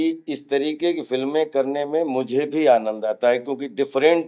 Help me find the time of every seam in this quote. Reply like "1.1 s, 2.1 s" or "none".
none